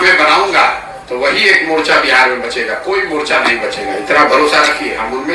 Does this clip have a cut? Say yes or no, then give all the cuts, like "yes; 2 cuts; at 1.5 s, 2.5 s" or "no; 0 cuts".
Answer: no; 0 cuts